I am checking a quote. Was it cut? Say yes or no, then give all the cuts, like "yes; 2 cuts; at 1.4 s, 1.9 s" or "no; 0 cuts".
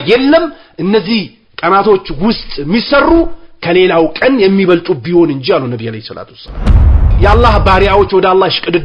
yes; 1 cut; at 6.8 s